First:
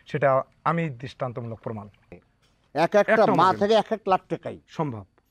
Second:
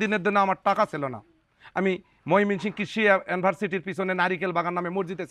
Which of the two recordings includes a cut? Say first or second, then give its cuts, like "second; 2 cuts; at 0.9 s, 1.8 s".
first; 1 cut; at 2.1 s